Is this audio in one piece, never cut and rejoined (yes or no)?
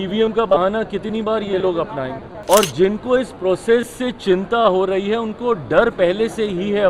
no